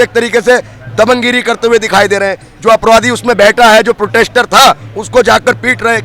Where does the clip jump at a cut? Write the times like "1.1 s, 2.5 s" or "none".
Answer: none

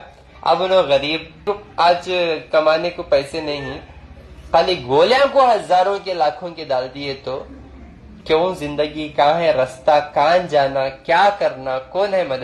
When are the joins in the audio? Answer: 1.4 s

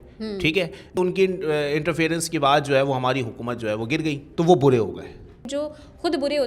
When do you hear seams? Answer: 1.0 s, 4.2 s, 5.5 s

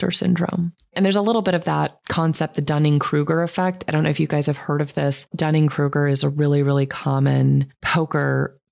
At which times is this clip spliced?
0.9 s, 2.0 s, 5.3 s

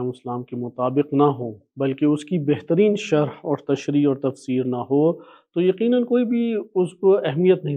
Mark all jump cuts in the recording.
none

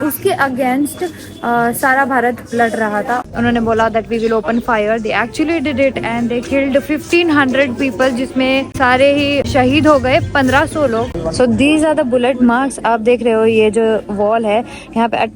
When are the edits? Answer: 3.2 s, 8.7 s, 9.4 s, 11.1 s

